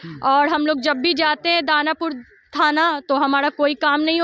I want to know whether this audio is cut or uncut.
uncut